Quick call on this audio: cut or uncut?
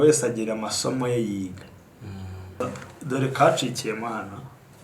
cut